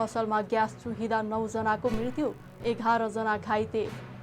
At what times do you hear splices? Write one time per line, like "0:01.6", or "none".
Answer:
none